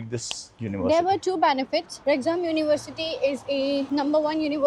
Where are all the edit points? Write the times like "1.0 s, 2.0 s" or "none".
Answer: none